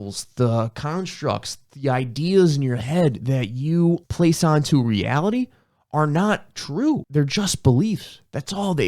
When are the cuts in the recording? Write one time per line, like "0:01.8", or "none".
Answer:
0:04.1
0:07.1